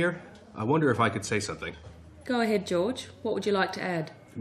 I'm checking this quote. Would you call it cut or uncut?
uncut